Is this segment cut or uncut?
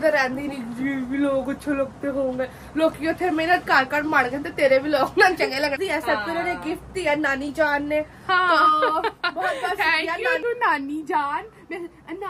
cut